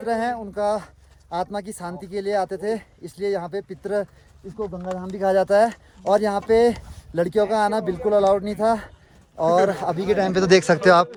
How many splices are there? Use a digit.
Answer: 0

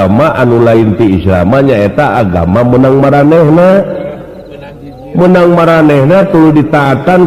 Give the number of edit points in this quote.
0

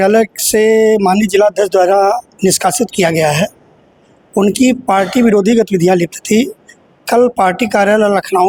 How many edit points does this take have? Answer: 0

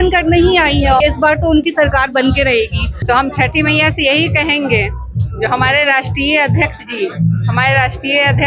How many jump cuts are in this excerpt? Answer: 2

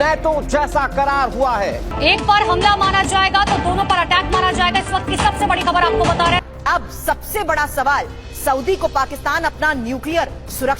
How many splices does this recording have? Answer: 0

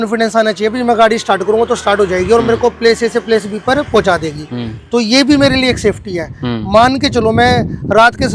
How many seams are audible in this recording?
0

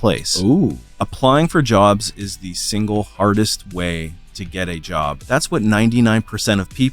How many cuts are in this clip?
2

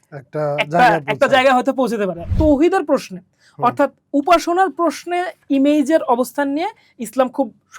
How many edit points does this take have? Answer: 1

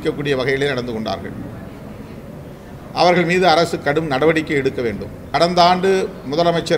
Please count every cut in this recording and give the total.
1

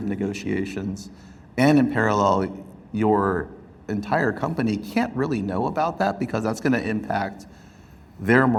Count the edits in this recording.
0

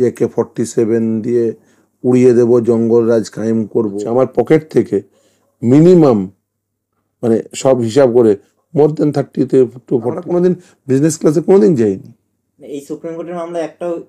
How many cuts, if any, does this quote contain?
2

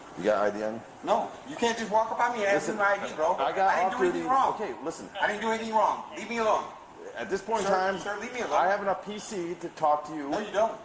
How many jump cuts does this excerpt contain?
0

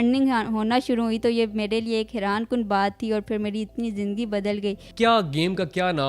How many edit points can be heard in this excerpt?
1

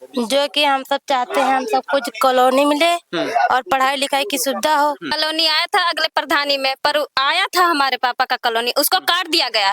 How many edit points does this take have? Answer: 1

